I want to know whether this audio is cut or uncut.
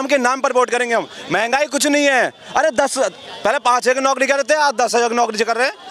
uncut